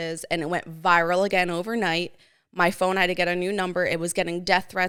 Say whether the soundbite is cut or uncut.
uncut